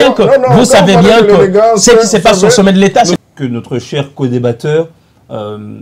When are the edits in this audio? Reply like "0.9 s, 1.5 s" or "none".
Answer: 3.2 s